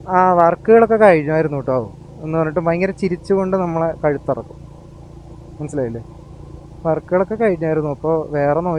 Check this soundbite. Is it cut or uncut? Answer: uncut